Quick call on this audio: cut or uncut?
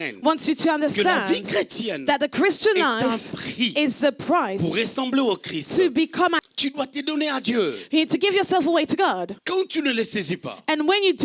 cut